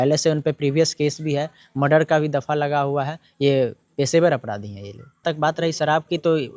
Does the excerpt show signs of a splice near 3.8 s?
no; 1 cut; at 5.2 s

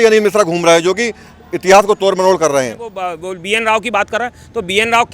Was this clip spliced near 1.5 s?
no; 1 cut; at 3.2 s

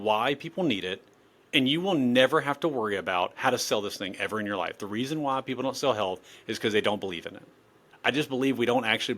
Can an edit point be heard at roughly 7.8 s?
yes; 1 cut; at 7.8 s

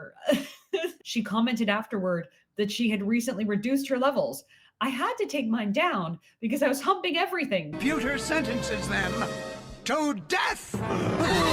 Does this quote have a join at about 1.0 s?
yes; 2 cuts; at 1.0 s, 7.7 s

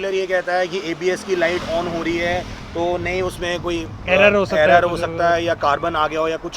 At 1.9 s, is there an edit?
no; 0 cuts

